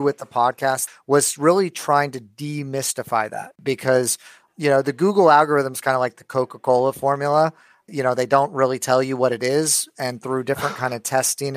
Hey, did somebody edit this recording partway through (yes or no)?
yes